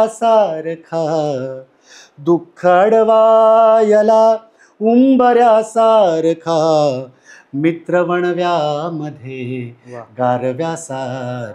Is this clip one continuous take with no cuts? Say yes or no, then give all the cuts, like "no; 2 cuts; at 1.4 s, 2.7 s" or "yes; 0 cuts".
yes; 0 cuts